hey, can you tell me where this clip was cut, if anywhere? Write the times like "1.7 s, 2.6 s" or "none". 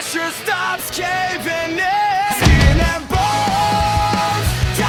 none